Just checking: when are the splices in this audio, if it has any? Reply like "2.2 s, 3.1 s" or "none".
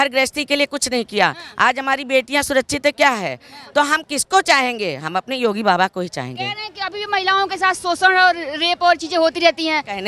none